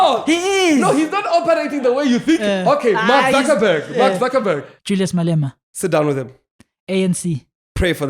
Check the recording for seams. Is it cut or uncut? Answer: cut